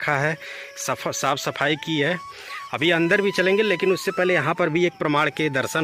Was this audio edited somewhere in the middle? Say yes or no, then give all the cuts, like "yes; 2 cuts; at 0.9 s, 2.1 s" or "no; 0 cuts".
no; 0 cuts